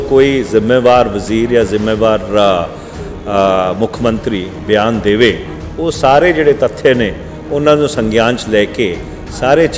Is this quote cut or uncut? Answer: uncut